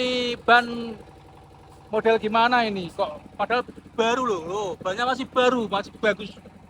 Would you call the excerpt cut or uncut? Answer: uncut